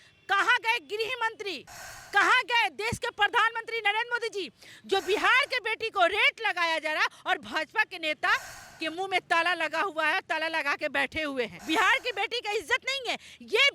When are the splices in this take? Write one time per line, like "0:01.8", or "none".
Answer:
0:11.6